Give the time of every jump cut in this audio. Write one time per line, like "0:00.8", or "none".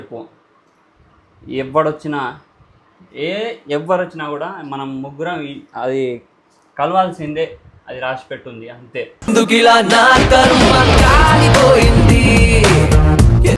none